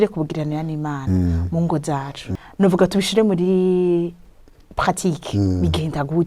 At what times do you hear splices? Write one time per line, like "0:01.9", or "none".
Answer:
0:02.2